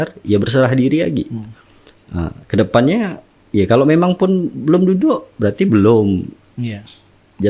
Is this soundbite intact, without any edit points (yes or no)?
yes